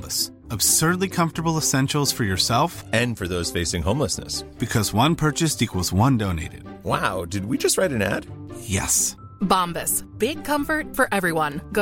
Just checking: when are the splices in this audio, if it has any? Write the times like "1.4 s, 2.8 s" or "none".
none